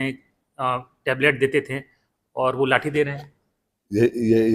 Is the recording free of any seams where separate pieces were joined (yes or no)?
yes